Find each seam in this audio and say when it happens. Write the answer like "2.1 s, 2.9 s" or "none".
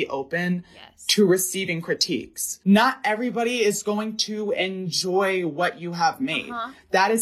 2.5 s